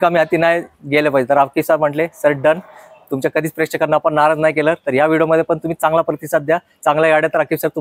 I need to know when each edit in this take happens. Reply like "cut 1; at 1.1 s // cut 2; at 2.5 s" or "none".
none